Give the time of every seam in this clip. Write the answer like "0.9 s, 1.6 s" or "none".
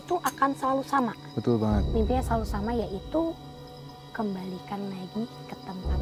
none